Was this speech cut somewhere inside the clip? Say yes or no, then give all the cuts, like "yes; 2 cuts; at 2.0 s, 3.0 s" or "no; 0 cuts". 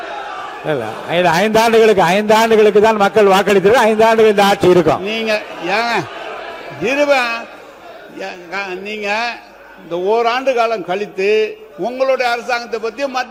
no; 0 cuts